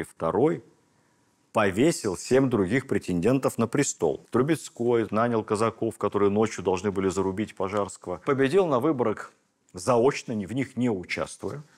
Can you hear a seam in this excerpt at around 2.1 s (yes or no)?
no